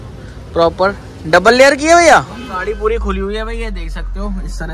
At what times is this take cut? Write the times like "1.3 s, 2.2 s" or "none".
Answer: 2.6 s